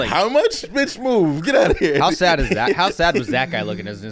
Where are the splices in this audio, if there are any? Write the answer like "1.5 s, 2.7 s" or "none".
none